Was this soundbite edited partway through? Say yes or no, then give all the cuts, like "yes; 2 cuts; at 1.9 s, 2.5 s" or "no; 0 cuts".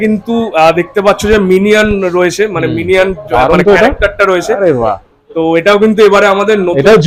no; 0 cuts